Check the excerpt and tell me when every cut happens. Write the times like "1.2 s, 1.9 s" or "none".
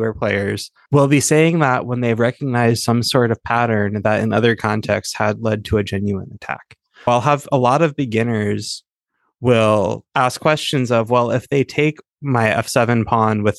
7.1 s

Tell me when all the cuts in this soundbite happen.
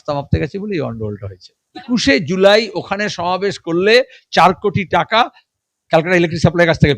1.8 s

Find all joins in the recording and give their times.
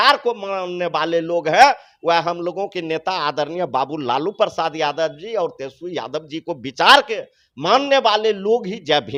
none

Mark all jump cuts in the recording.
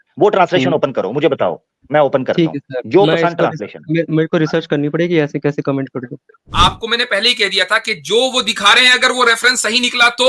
6.5 s

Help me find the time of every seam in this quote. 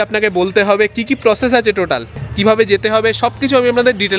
2.2 s

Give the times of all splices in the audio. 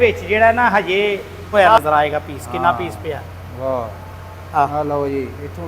1.5 s

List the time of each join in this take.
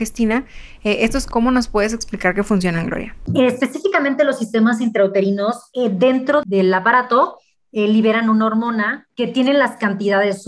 1.3 s, 3.2 s, 5.6 s, 6.4 s, 9.0 s

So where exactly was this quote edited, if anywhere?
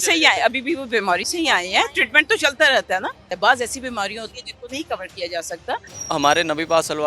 3.3 s, 5.9 s

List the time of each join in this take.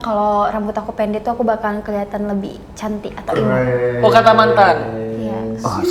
none

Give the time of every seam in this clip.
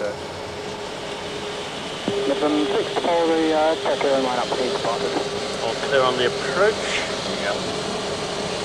none

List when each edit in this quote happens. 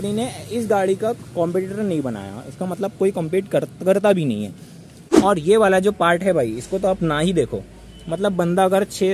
5.0 s

